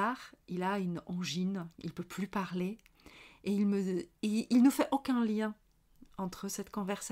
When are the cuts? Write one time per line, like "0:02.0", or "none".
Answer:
none